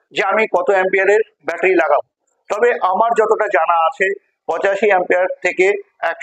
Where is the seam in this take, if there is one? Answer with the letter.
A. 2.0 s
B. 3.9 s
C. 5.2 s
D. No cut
D